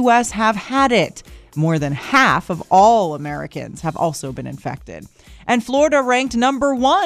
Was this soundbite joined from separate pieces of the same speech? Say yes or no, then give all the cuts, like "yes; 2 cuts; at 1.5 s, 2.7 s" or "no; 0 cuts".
no; 0 cuts